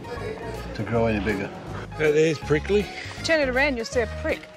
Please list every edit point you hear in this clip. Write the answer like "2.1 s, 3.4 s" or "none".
1.7 s, 3.1 s